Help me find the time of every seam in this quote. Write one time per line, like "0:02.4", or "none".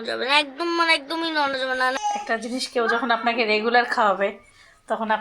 0:02.0